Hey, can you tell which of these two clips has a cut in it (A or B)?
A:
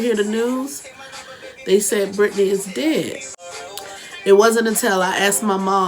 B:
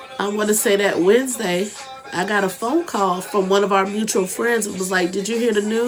A